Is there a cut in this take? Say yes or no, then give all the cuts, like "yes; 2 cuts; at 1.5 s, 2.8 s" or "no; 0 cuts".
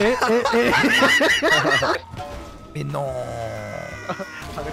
yes; 1 cut; at 2.0 s